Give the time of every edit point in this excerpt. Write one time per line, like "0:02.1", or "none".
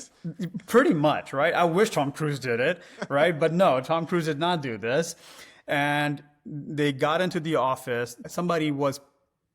0:08.2